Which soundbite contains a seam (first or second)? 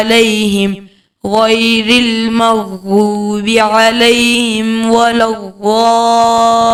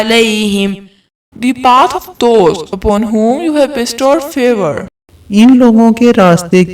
second